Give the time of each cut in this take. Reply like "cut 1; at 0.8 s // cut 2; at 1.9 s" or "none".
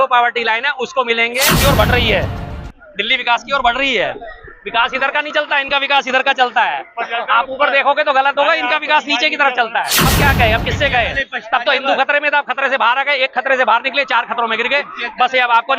cut 1; at 1.5 s // cut 2; at 10.0 s